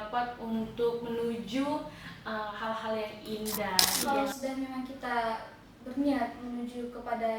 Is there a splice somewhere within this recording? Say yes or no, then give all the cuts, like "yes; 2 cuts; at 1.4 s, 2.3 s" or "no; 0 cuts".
yes; 1 cut; at 4.0 s